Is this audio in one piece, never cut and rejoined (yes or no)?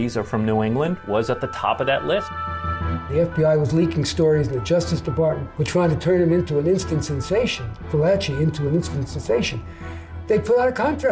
no